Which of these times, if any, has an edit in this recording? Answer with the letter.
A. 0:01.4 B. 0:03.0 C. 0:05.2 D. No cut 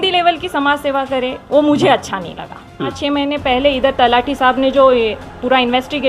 B